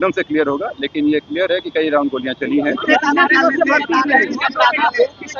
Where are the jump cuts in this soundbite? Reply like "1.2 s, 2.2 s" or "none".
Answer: none